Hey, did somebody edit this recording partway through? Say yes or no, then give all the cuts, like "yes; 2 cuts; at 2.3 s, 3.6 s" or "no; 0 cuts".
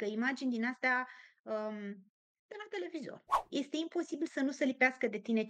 yes; 1 cut; at 3.5 s